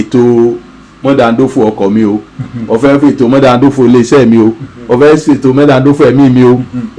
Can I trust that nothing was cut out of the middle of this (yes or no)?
yes